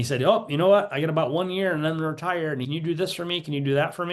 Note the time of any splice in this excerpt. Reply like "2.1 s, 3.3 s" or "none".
2.6 s